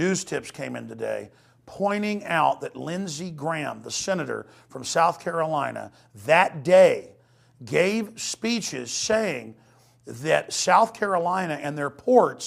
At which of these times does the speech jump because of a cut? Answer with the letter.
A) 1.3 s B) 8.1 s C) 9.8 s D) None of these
D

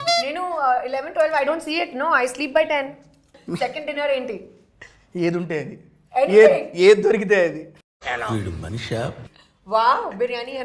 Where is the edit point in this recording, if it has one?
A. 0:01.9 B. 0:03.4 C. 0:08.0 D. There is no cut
B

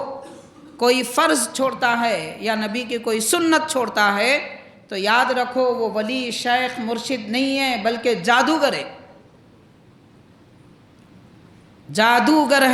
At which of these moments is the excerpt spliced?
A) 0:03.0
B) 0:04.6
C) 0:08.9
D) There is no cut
D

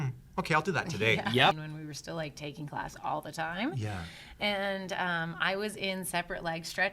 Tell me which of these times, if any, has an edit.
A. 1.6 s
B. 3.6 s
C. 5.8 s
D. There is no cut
A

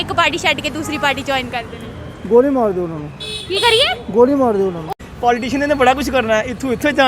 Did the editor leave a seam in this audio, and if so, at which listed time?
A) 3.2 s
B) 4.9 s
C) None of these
B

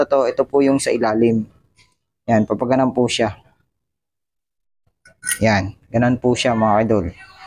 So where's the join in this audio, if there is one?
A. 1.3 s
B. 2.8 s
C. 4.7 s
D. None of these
D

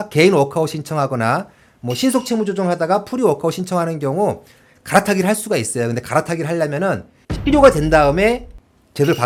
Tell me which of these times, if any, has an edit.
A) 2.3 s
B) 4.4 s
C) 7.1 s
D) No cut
D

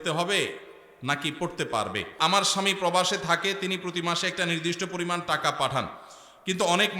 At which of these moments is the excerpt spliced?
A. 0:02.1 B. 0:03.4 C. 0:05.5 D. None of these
A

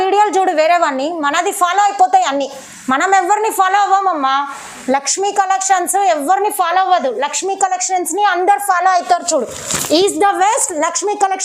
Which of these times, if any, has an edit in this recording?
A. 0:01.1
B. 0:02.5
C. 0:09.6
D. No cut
D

